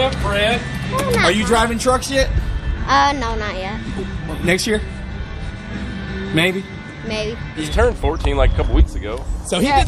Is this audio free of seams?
no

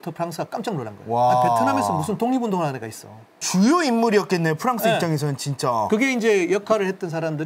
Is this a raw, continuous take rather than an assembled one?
yes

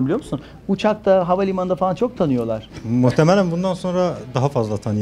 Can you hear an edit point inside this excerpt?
yes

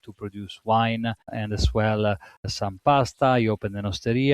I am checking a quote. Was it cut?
yes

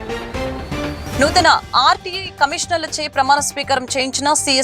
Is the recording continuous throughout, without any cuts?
no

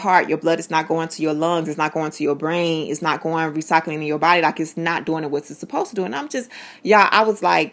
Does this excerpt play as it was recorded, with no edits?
yes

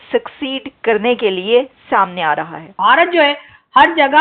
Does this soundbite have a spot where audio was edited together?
yes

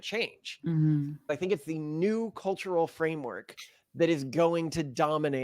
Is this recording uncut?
no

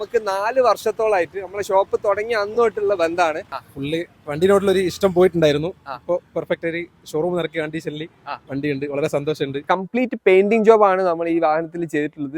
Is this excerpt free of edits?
no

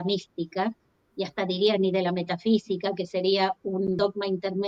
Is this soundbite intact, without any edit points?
yes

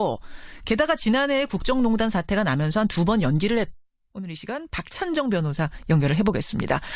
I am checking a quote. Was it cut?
no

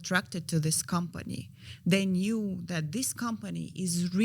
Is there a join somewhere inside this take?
no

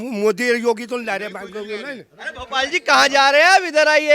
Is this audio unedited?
yes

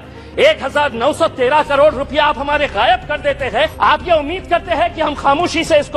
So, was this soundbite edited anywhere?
yes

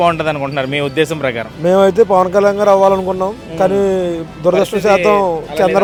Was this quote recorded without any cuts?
yes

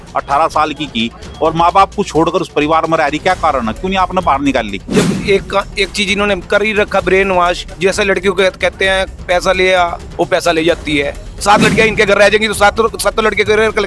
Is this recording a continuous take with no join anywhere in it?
no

